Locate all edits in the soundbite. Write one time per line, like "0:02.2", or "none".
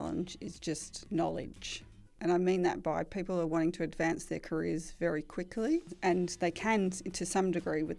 0:02.1
0:05.9